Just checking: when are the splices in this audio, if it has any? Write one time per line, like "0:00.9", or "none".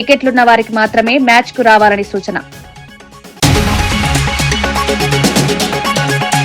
0:05.6